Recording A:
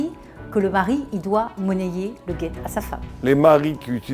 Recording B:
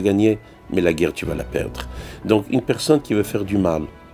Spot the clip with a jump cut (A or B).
A